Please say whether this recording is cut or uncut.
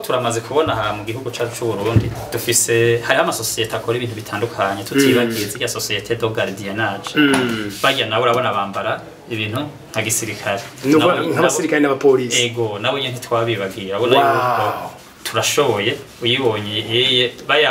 uncut